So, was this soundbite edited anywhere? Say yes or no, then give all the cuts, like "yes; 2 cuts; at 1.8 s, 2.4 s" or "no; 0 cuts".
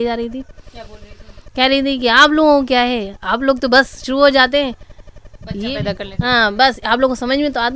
no; 0 cuts